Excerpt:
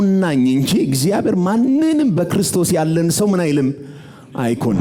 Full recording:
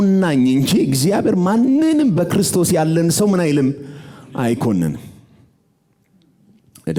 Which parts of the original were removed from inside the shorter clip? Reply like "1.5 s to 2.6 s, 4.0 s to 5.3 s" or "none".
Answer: none